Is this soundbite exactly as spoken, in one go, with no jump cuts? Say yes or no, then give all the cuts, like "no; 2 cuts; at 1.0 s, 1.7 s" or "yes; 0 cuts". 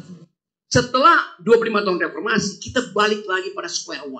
yes; 0 cuts